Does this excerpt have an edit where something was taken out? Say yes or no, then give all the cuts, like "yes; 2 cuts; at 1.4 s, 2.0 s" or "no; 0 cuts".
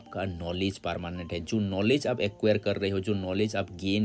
no; 0 cuts